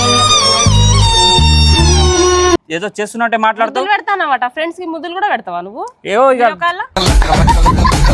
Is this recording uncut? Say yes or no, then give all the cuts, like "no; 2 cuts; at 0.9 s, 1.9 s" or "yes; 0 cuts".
no; 1 cut; at 2.6 s